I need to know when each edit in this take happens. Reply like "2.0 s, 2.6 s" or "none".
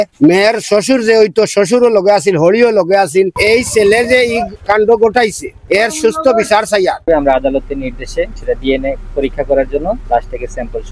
3.4 s, 7.1 s, 8.4 s, 10.0 s